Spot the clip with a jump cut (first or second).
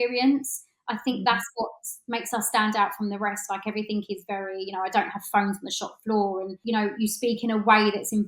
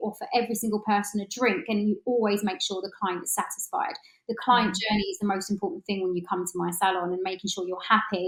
first